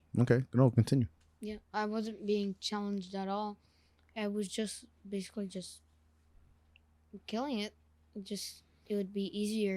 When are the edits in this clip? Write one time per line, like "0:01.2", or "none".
0:08.8

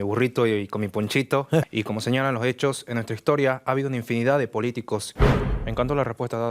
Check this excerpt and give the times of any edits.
0:01.6
0:05.1

